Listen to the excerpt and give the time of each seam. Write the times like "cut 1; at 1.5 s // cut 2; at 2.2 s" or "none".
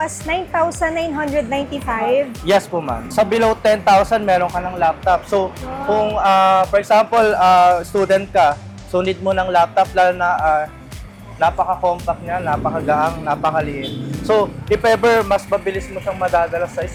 none